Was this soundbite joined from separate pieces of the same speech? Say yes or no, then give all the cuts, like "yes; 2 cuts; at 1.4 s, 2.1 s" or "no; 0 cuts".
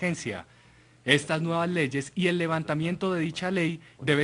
yes; 1 cut; at 2.6 s